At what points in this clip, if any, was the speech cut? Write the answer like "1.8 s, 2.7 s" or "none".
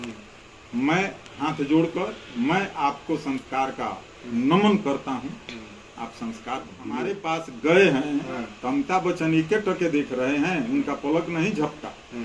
7.2 s